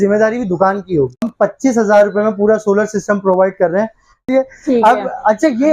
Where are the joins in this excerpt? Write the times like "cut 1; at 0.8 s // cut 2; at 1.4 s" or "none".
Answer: cut 1; at 1.2 s // cut 2; at 4.3 s